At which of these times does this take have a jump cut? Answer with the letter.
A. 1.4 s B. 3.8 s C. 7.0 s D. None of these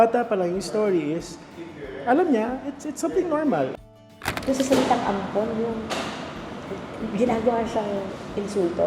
B